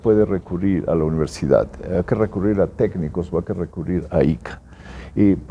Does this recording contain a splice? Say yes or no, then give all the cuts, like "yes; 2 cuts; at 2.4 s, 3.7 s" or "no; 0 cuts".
no; 0 cuts